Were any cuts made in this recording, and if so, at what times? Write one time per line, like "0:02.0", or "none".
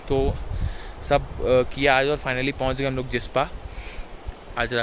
none